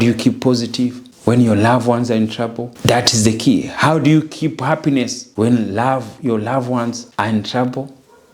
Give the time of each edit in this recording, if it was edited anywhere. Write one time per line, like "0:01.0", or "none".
0:01.1
0:02.7
0:05.2
0:07.0